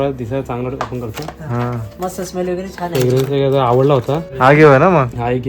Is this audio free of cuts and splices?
no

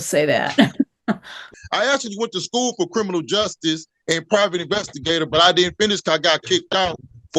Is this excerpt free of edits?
no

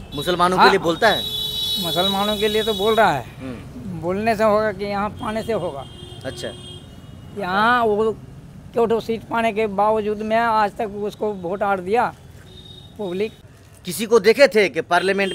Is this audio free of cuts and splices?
yes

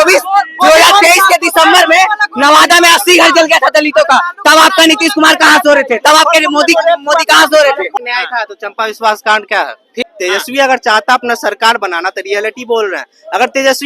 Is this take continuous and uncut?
no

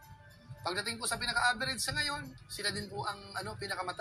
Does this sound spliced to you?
no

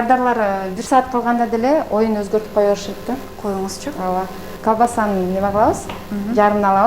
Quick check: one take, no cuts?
yes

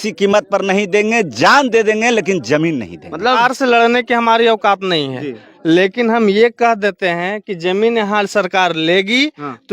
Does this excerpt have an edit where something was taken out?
yes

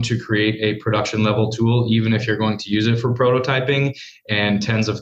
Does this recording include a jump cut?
no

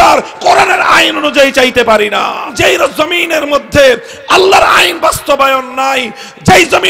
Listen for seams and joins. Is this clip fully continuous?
no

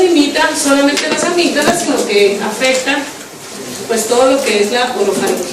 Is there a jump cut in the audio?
no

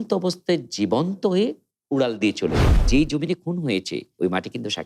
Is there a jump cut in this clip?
yes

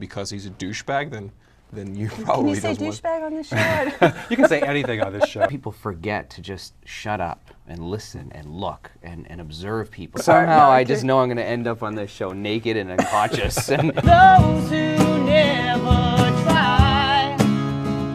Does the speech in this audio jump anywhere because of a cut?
yes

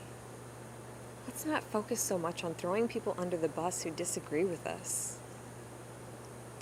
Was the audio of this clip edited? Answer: no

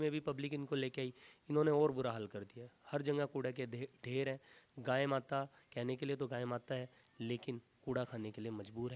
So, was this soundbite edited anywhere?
no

